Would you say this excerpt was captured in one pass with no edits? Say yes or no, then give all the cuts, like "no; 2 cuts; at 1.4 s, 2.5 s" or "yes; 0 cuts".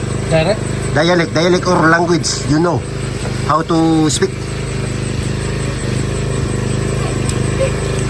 yes; 0 cuts